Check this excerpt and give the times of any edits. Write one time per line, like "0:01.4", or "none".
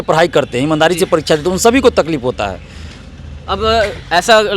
none